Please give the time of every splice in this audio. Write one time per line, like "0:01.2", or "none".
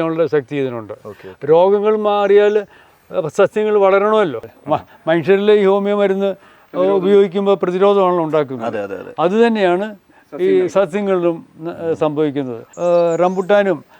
0:04.5
0:12.7